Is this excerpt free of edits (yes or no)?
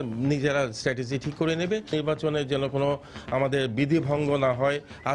no